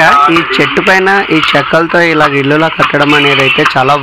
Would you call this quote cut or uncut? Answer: uncut